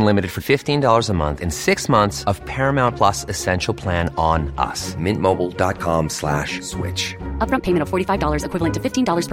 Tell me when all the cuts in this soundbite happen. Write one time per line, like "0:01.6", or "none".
none